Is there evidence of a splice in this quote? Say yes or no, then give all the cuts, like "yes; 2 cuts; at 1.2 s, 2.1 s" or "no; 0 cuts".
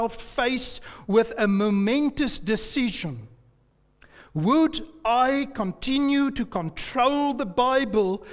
no; 0 cuts